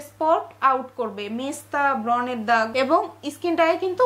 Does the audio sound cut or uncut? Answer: cut